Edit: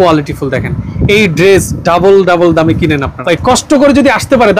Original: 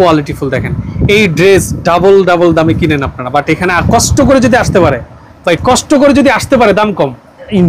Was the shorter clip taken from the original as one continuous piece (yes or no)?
no